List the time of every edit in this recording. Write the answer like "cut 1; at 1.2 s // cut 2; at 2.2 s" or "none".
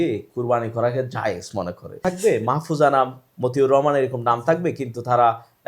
cut 1; at 2.0 s